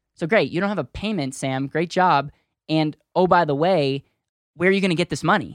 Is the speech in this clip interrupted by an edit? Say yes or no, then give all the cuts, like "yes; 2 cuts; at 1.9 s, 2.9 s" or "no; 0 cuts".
yes; 1 cut; at 4.3 s